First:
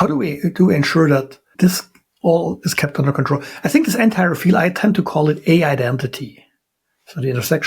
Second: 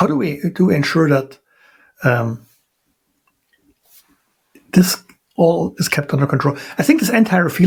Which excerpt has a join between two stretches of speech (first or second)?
first